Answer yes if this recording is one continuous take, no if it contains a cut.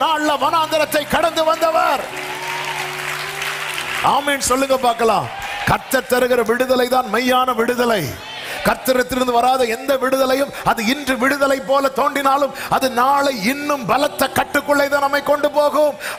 yes